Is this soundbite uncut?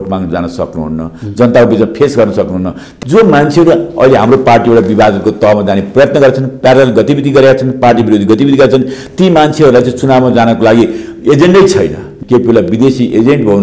no; 2 cuts; at 2.8 s, 12.1 s

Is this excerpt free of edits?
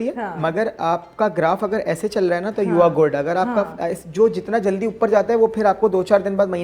yes; 0 cuts

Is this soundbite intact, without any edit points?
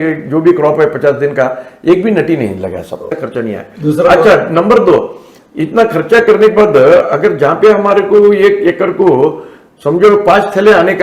no; 1 cut; at 3.1 s

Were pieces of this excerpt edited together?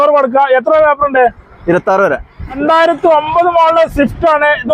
yes; 1 cut; at 2.6 s

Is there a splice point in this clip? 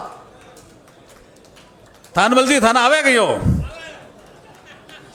no; 0 cuts

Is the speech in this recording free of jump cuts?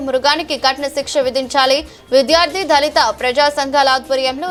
yes; 0 cuts

